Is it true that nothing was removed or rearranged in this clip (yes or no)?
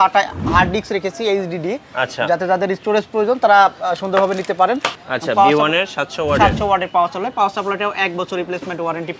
no